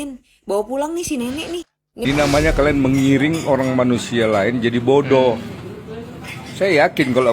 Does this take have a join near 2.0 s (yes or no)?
yes